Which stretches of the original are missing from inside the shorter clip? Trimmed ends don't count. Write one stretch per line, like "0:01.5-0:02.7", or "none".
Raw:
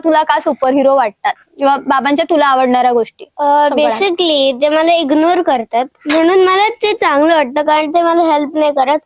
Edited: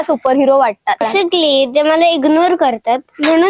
0:01.4-0:03.9